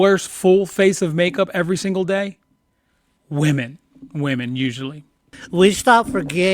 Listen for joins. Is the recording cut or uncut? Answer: cut